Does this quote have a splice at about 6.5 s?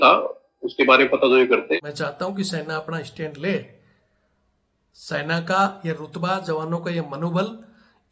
no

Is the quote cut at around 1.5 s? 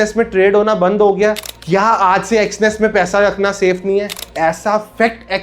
yes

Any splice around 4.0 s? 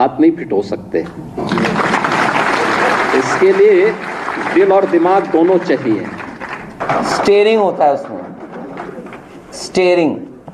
no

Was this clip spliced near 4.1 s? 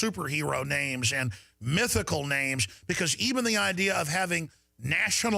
yes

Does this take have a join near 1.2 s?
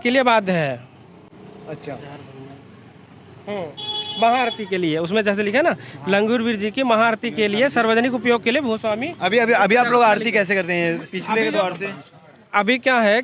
no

